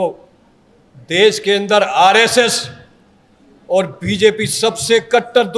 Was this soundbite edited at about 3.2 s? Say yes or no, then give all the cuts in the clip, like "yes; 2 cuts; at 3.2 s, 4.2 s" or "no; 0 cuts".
no; 0 cuts